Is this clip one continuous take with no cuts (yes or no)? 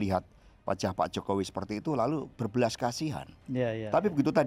no